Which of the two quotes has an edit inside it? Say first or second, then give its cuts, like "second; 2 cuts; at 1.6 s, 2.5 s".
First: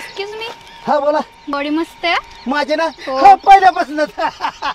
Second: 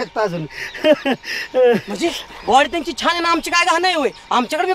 first; 1 cut; at 1.5 s